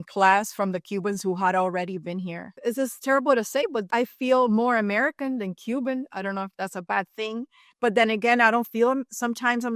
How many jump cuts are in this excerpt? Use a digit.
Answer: 2